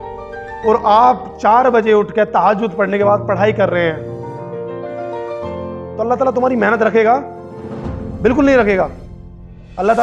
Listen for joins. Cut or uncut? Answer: cut